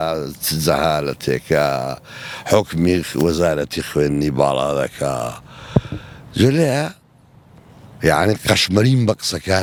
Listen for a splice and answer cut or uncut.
uncut